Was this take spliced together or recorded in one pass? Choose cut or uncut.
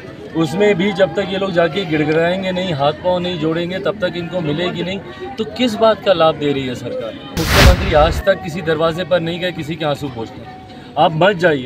cut